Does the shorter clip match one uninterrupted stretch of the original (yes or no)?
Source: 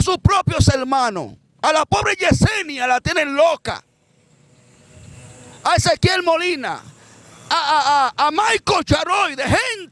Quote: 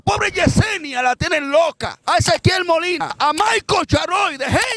no